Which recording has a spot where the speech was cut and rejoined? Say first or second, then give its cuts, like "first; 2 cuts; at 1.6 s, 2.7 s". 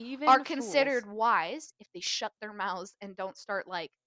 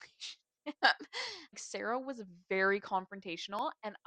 second; 1 cut; at 1.5 s